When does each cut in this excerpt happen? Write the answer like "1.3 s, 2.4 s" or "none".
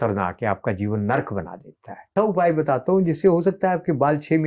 2.1 s

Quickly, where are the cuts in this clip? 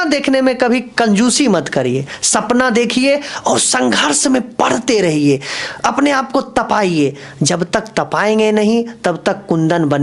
none

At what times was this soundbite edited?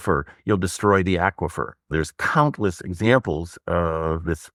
none

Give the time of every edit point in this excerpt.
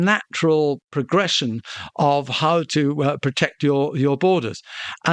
0.9 s

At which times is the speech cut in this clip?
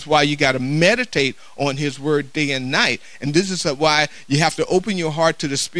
none

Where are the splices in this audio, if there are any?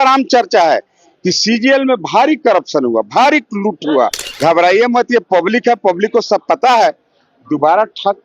4.2 s

